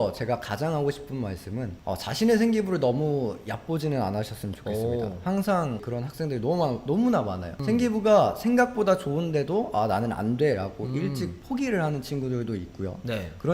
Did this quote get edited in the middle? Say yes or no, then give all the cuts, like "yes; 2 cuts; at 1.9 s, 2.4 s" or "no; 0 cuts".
yes; 2 cuts; at 1.8 s, 5.8 s